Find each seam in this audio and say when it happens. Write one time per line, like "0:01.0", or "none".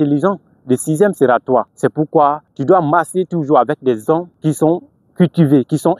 0:02.1
0:04.3